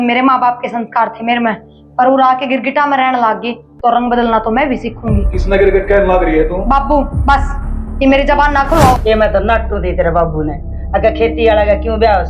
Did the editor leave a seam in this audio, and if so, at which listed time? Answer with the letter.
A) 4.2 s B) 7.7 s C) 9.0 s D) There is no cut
C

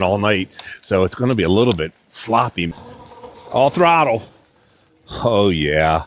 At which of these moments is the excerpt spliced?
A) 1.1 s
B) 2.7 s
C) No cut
B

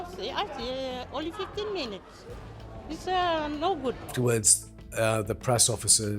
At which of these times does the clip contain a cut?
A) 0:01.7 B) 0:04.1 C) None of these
B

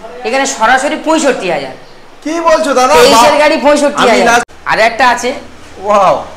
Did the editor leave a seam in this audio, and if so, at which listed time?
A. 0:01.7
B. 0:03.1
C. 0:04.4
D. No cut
C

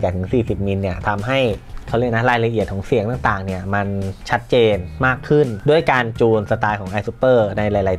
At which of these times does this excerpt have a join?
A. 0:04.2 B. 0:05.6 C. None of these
B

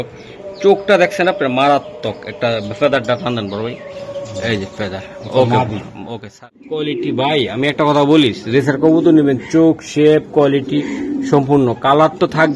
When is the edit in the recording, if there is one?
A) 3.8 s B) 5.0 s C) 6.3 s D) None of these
C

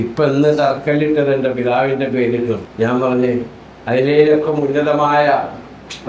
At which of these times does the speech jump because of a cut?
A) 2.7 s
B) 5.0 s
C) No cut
A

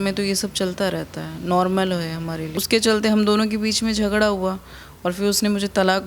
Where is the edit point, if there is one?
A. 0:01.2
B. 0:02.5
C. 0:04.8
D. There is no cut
B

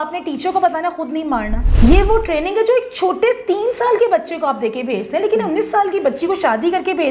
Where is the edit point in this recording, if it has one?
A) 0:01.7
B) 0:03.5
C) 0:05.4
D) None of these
A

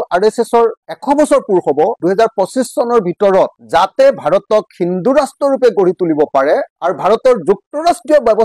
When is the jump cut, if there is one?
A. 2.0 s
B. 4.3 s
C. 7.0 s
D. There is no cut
A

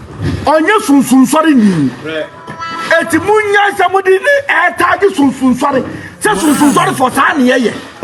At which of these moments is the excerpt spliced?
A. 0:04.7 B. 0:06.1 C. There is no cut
C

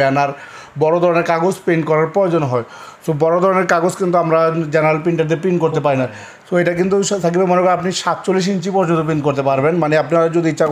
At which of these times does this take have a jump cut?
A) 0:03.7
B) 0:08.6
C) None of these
C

